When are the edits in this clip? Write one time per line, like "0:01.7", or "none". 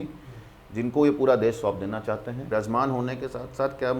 0:02.4